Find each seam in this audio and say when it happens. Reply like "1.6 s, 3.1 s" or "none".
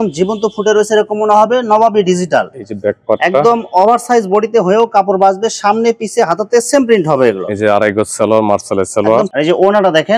none